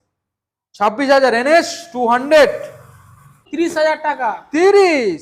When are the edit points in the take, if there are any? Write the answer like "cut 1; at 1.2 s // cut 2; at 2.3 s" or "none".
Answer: cut 1; at 3.4 s